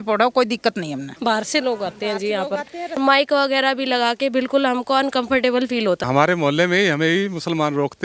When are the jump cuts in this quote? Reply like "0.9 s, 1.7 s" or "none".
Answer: 3.0 s, 6.0 s